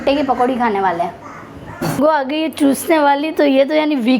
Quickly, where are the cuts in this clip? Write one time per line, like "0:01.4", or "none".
0:02.0